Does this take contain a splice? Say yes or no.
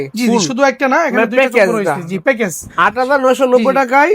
no